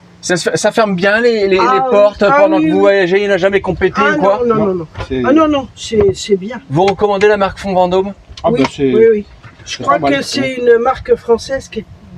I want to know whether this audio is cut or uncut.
uncut